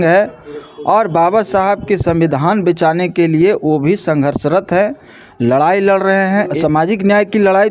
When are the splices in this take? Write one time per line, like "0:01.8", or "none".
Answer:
0:06.5